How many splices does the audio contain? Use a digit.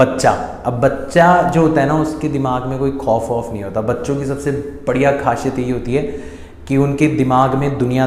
0